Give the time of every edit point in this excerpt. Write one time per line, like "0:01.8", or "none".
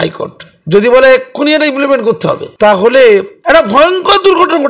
0:02.5
0:03.3